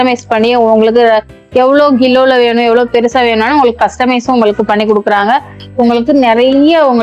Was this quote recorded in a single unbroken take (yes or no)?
no